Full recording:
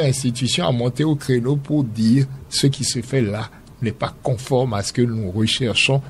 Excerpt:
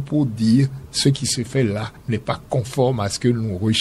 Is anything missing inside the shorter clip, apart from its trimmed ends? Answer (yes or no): yes